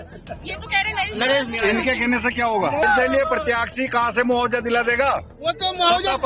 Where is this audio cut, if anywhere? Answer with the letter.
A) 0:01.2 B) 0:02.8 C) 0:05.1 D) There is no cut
B